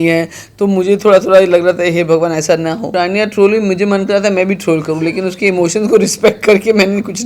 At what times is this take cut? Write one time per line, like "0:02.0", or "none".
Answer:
0:02.8